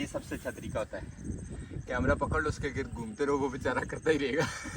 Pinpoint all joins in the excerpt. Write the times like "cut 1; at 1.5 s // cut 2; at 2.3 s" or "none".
none